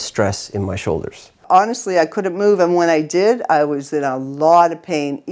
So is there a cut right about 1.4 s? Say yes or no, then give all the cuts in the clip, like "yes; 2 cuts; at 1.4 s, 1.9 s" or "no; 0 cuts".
yes; 1 cut; at 1.4 s